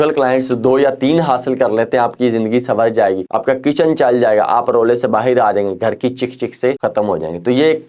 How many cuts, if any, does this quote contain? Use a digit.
2